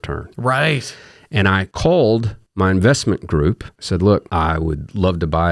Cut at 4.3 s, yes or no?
yes